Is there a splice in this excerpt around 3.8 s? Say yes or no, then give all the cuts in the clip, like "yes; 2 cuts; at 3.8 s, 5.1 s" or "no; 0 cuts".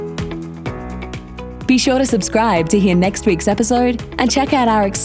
no; 1 cut; at 1.6 s